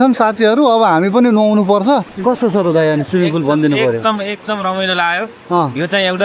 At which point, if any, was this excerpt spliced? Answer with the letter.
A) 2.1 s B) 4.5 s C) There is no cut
A